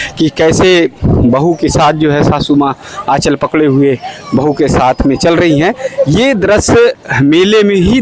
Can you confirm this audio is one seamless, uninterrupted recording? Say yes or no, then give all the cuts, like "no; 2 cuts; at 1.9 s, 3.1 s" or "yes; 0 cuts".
yes; 0 cuts